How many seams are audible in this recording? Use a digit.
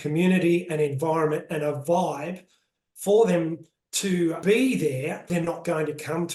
2